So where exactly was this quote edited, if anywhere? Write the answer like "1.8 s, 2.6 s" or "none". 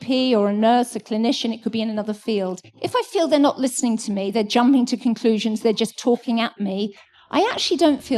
2.7 s